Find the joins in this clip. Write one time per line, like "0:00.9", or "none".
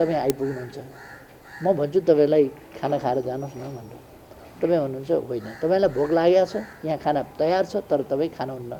none